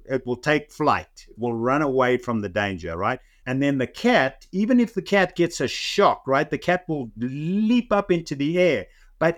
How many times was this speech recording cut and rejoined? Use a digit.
1